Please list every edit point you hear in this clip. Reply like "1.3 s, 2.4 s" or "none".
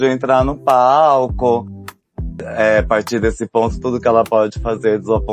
1.9 s